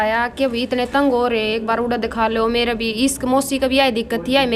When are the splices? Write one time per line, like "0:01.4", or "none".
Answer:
none